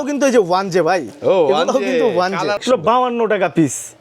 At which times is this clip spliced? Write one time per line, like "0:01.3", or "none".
0:02.6